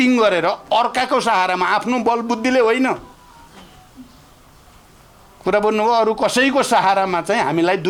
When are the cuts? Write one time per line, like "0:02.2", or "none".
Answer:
none